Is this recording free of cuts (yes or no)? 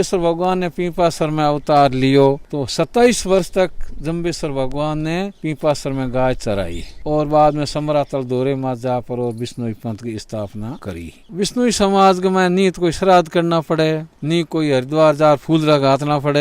no